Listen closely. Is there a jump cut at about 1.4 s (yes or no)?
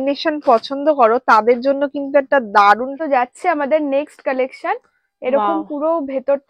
no